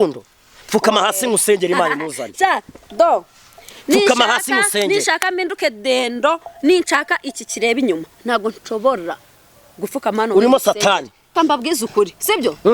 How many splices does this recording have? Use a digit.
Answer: 1